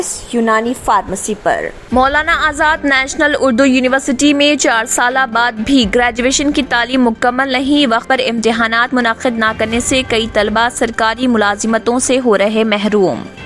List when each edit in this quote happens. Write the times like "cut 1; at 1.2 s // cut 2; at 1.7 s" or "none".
cut 1; at 1.7 s